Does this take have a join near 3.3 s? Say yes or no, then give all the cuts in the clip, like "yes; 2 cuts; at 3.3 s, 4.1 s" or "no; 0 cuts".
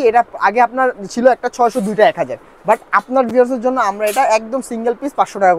no; 0 cuts